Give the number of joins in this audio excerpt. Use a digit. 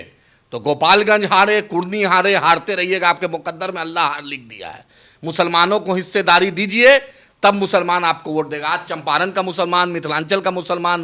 0